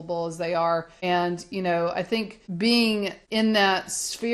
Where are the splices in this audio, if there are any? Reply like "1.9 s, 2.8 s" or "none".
0.9 s, 2.4 s, 3.2 s